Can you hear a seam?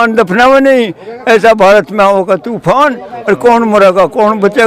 no; 0 cuts

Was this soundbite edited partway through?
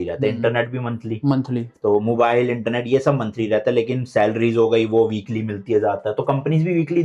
no; 0 cuts

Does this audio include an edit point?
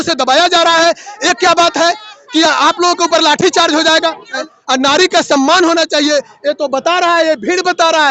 yes; 1 cut; at 4.4 s

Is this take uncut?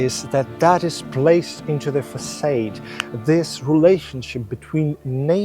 yes; 0 cuts

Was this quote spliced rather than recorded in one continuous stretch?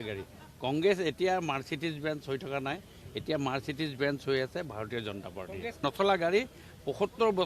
no; 0 cuts

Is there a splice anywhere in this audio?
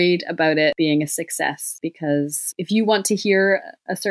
yes; 3 cuts; at 0.8 s, 1.7 s, 2.5 s

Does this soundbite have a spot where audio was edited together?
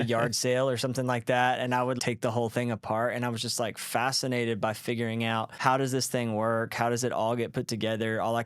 yes; 2 cuts; at 2.0 s, 5.5 s

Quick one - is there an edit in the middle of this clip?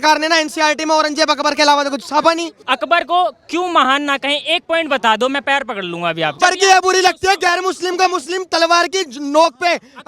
yes; 2 cuts; at 2.6 s, 6.4 s

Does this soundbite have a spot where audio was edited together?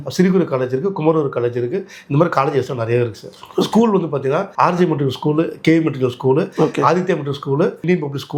no; 0 cuts

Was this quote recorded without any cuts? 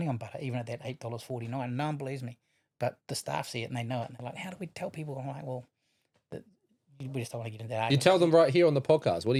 yes; 0 cuts

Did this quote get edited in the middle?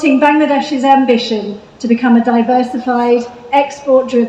no; 0 cuts

